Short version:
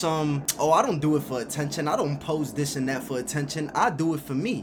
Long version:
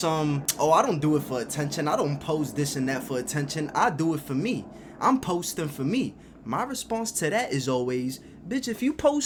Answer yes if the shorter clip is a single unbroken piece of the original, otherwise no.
yes